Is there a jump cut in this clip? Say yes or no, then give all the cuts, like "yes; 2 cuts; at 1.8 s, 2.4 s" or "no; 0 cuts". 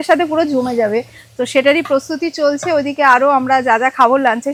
no; 0 cuts